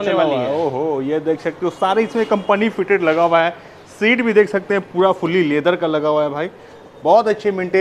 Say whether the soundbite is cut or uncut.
uncut